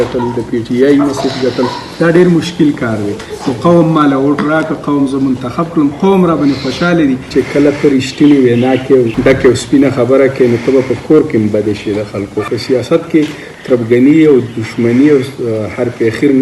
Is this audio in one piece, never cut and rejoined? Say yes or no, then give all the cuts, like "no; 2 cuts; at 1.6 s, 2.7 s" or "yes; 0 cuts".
no; 3 cuts; at 7.3 s, 9.1 s, 12.5 s